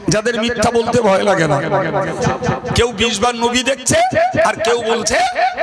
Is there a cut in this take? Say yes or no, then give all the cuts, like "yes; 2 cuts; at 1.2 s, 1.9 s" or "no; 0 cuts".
yes; 1 cut; at 2.1 s